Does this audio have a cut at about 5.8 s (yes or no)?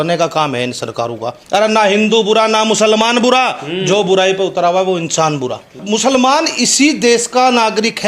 yes